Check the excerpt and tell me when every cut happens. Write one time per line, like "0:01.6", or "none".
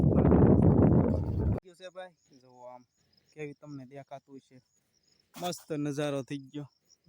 0:01.6